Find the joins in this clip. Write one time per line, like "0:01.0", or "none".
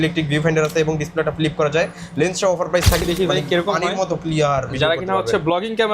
0:03.0